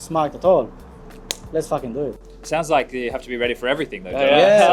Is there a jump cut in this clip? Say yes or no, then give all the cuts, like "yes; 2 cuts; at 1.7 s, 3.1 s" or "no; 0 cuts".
yes; 1 cut; at 2.2 s